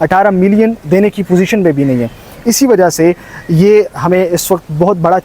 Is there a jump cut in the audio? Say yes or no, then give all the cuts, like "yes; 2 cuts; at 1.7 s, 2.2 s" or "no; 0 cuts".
no; 0 cuts